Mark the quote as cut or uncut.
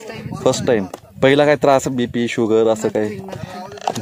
cut